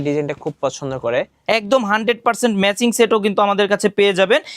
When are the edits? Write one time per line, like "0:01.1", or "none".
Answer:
0:01.3